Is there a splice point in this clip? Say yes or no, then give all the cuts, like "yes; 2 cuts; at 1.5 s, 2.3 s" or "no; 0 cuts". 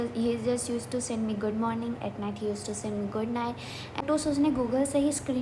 yes; 1 cut; at 4.0 s